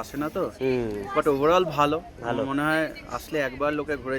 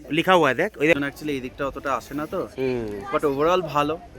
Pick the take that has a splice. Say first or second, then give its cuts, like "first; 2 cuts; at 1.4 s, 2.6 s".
second; 1 cut; at 0.9 s